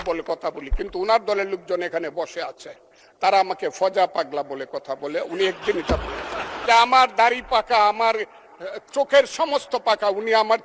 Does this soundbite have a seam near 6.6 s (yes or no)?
yes